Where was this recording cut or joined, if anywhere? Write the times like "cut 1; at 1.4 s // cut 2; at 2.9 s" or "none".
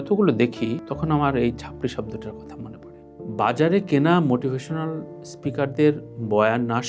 cut 1; at 3.1 s